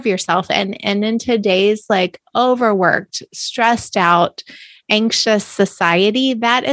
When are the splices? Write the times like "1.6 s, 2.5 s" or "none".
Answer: none